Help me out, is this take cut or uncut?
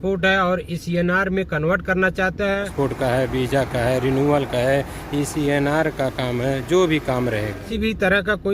cut